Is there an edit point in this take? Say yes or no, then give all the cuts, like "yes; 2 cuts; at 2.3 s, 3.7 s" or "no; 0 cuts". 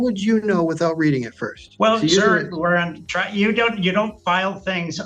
yes; 1 cut; at 1.6 s